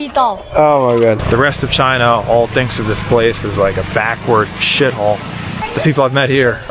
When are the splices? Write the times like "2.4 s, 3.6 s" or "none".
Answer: 1.2 s, 5.6 s